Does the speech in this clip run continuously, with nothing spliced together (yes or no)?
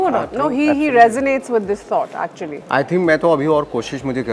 no